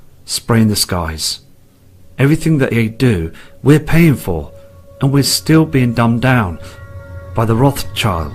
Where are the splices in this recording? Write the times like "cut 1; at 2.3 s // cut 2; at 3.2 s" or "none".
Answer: cut 1; at 2.0 s